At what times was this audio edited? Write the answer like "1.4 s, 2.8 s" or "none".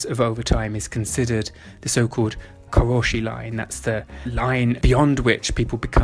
2.6 s, 4.6 s